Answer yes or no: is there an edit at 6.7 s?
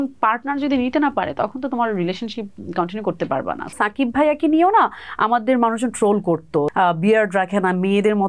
yes